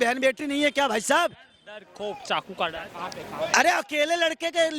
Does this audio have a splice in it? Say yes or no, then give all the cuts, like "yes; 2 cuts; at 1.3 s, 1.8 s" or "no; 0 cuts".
no; 0 cuts